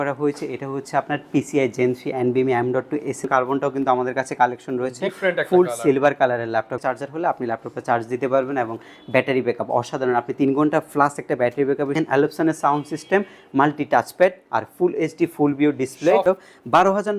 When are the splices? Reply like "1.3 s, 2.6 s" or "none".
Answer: 3.2 s, 6.8 s, 11.9 s, 16.2 s